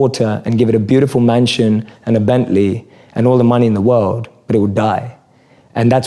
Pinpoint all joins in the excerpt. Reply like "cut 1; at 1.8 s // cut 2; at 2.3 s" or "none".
none